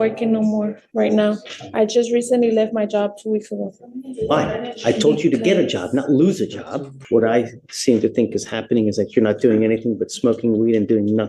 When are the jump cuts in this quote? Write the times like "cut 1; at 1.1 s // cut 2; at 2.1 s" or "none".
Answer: cut 1; at 7.0 s